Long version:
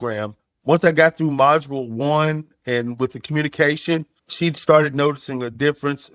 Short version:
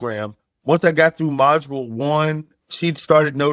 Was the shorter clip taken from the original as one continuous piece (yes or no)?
no